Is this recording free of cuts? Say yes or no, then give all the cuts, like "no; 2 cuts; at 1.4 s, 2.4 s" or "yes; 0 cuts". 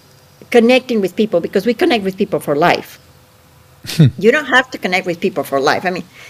yes; 0 cuts